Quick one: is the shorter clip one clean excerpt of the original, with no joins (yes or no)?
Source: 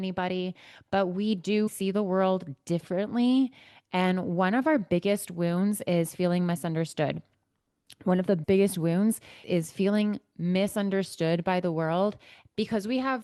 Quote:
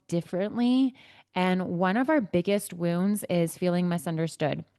yes